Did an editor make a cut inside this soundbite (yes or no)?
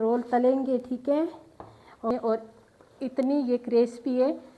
yes